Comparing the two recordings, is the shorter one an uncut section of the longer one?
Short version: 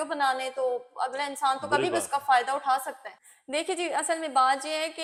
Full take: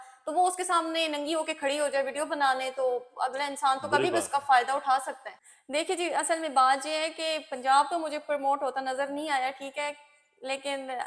yes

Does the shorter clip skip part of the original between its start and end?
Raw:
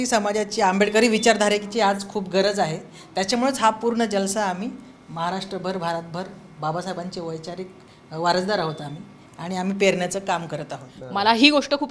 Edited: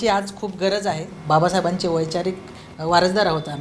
yes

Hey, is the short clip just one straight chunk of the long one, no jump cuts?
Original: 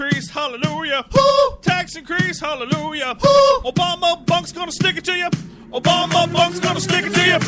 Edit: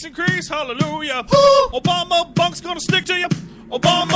no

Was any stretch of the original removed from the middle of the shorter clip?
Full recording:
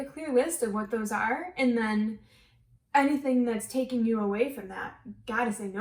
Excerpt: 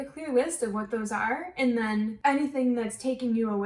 yes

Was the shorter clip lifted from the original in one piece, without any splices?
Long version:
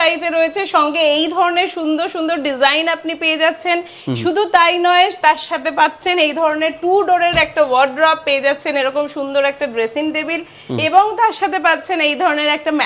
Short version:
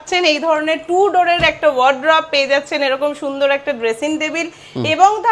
yes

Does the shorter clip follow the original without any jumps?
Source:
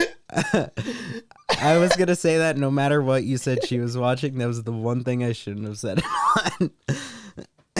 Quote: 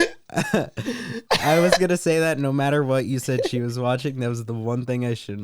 no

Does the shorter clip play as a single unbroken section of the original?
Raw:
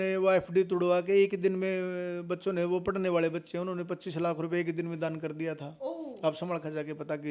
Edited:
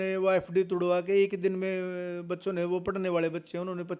yes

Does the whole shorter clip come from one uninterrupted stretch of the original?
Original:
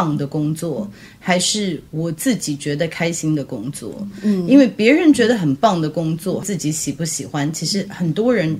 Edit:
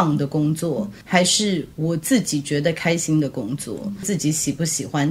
no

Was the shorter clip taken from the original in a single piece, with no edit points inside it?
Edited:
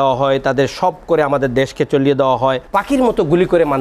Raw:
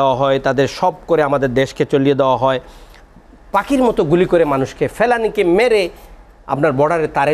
no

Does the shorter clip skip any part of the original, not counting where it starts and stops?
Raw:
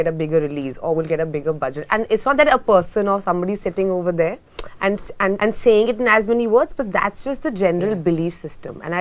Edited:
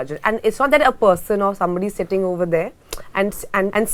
no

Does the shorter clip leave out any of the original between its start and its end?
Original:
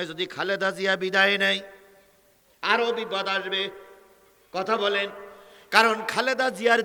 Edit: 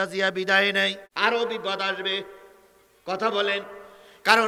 yes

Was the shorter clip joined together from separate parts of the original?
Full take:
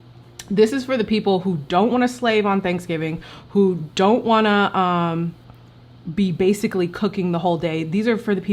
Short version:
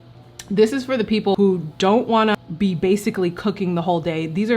yes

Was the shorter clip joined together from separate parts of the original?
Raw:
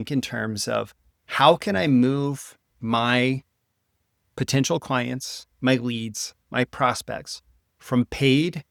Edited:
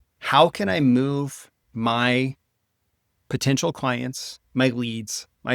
no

